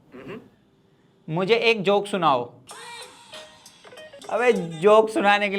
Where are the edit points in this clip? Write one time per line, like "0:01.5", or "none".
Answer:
0:02.6
0:04.2